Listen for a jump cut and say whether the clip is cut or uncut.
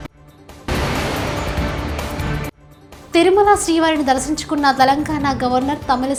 uncut